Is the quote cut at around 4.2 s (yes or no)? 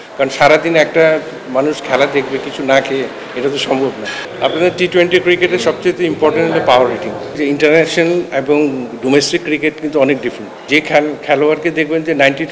yes